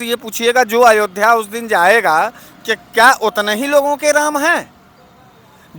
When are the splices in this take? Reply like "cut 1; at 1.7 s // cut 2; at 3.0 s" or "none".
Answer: none